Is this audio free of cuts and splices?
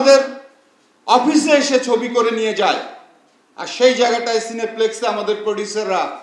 yes; 0 cuts

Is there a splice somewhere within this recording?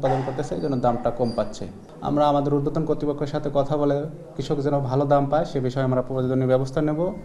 no; 0 cuts

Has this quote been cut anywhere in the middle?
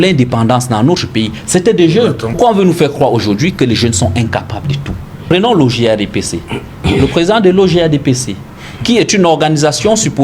yes; 2 cuts; at 2.3 s, 5.2 s

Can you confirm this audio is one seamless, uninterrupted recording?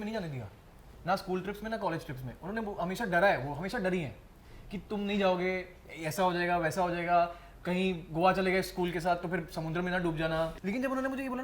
no; 1 cut; at 10.5 s

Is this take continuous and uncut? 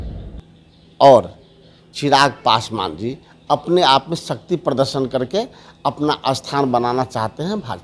yes; 0 cuts

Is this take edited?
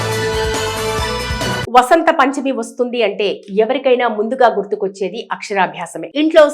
yes; 1 cut; at 0.9 s

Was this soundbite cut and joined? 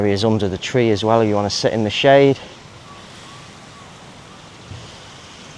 no; 0 cuts

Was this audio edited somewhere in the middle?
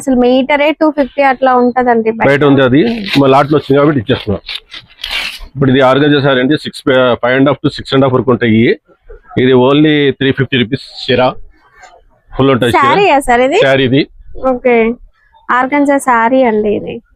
no; 0 cuts

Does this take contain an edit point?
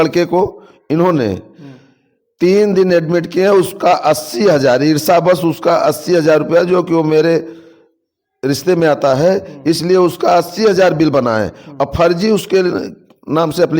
no; 0 cuts

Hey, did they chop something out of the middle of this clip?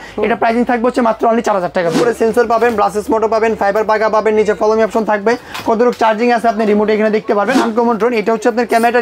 yes; 2 cuts; at 2.0 s, 7.6 s

